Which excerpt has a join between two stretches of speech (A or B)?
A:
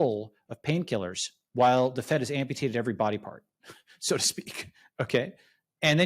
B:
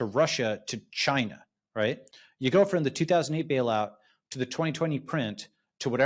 A